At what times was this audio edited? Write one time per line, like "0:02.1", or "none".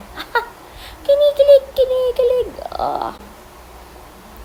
none